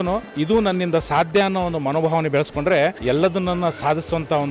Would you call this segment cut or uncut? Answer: cut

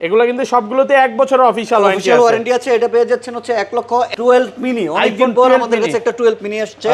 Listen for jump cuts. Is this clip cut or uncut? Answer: cut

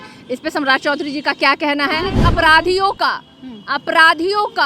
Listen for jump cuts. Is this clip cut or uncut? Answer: cut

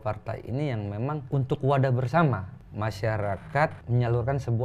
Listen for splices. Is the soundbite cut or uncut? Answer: cut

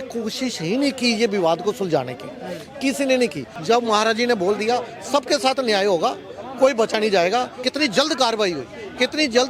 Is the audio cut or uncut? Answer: cut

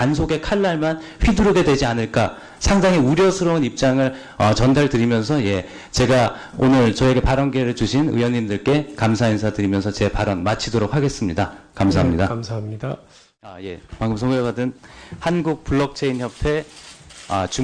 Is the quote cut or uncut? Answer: cut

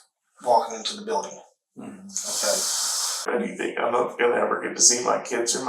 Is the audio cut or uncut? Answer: cut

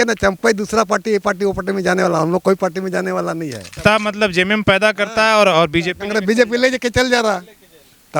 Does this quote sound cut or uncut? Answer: cut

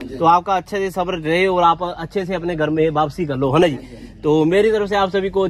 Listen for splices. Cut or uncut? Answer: uncut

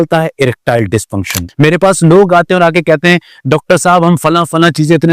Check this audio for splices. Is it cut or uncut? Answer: cut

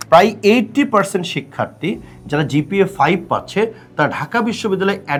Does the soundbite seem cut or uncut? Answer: uncut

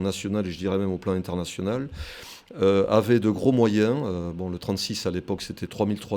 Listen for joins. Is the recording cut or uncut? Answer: uncut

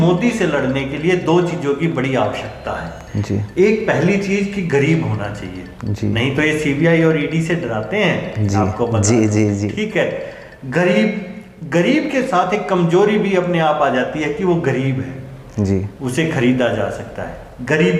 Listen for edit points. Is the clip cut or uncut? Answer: uncut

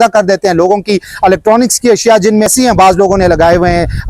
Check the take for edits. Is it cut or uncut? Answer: cut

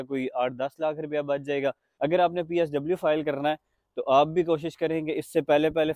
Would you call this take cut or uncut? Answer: cut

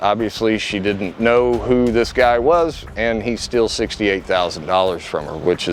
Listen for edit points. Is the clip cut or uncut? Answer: uncut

